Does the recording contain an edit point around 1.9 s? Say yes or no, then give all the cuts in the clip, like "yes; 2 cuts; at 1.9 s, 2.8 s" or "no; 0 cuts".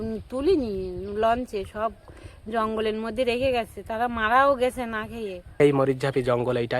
no; 1 cut; at 5.5 s